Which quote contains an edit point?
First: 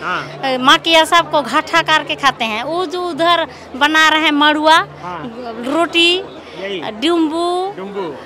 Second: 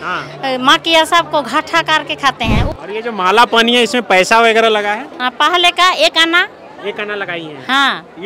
second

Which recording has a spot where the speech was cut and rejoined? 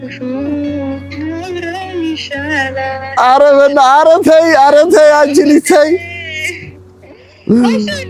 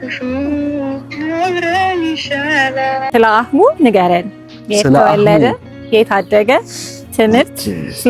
second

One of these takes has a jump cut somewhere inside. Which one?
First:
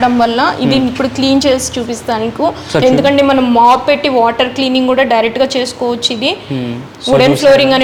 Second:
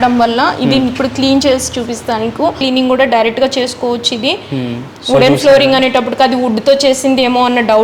second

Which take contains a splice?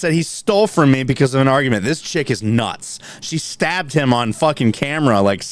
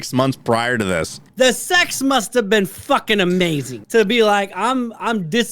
second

